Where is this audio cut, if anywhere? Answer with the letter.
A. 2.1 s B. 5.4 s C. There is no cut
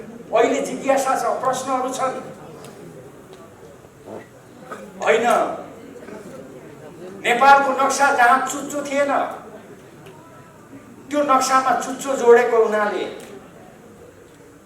C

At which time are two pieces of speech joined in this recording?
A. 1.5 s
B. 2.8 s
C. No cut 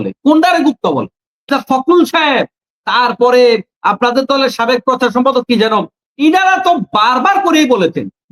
A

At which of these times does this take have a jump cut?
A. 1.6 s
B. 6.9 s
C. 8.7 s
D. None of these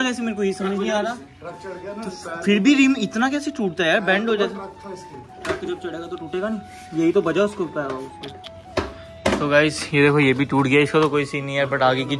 D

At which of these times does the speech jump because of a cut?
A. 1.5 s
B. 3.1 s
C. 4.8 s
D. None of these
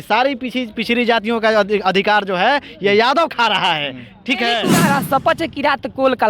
C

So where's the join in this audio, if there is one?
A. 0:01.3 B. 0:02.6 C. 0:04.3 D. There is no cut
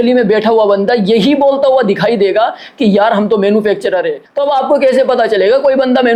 D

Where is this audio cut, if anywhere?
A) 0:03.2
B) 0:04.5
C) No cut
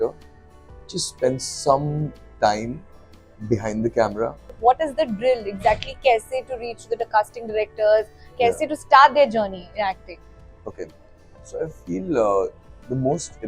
B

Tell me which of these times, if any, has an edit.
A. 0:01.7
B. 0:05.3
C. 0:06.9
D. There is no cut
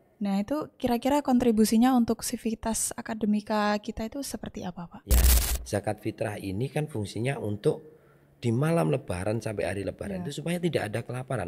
B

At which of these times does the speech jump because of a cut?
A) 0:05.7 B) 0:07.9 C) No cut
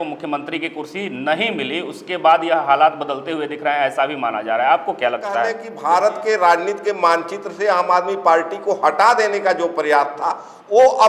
A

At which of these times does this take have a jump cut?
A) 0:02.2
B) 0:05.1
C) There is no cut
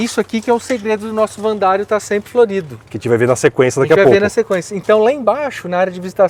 C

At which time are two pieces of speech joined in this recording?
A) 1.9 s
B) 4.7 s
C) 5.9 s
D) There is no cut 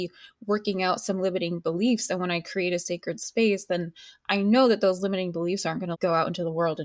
C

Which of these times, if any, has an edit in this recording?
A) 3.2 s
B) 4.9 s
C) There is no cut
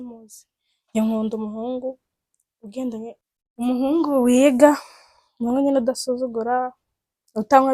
A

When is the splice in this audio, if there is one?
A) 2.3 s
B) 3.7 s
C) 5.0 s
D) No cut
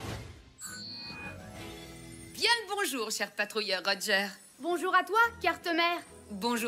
A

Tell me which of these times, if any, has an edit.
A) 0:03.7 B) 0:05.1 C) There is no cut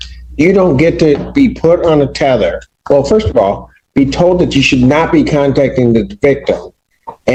C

